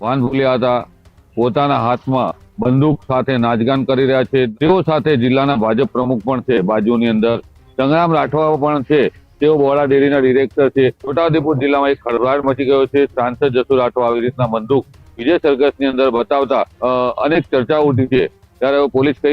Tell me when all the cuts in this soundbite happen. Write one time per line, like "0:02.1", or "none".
0:04.5
0:11.0
0:16.7